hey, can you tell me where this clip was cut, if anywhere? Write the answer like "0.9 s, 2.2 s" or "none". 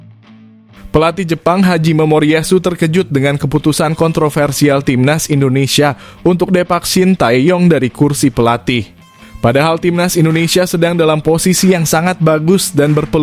0.9 s